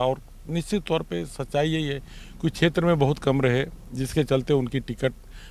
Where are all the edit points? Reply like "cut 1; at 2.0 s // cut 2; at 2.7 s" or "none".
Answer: none

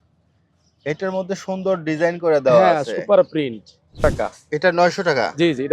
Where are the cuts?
cut 1; at 4.0 s

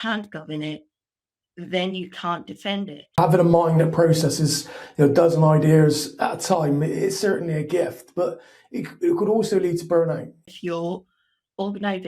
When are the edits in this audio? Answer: cut 1; at 3.2 s // cut 2; at 10.3 s

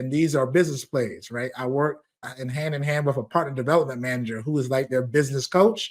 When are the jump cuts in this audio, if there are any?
cut 1; at 2.3 s

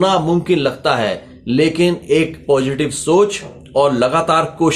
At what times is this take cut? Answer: none

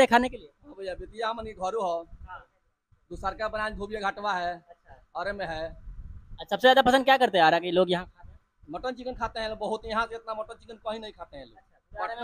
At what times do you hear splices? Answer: none

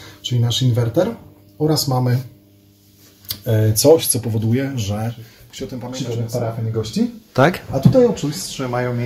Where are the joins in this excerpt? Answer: cut 1; at 5.9 s

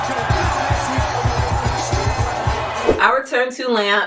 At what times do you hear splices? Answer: none

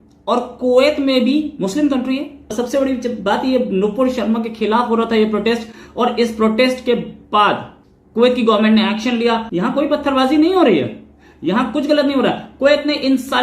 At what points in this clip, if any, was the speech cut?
cut 1; at 2.5 s // cut 2; at 9.4 s

